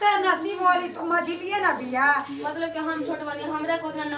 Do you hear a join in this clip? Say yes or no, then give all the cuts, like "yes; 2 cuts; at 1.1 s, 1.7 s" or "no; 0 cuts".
no; 0 cuts